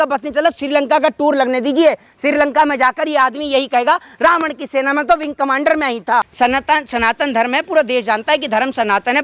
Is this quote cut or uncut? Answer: cut